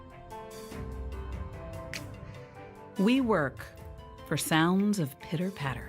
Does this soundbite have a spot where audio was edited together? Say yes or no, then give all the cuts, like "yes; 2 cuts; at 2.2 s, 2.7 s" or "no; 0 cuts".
yes; 1 cut; at 1.5 s